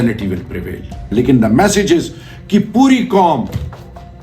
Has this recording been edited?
yes; 1 cut; at 1.0 s

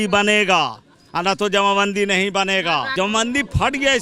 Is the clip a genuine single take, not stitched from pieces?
no; 1 cut; at 2.9 s

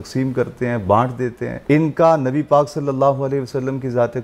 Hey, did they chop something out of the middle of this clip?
yes; 1 cut; at 1.5 s

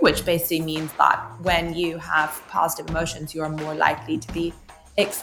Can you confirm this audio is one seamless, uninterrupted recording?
yes; 0 cuts

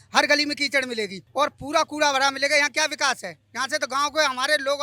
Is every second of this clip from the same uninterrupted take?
yes; 0 cuts

